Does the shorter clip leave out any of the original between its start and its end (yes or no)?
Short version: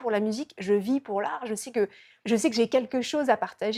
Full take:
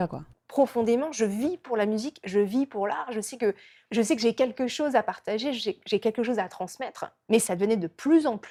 no